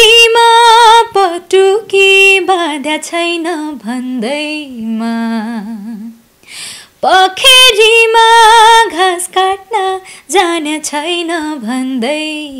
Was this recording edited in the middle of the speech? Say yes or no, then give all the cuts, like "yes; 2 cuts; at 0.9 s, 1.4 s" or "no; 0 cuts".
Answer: no; 0 cuts